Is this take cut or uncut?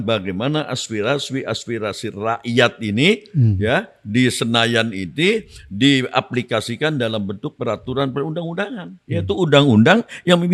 uncut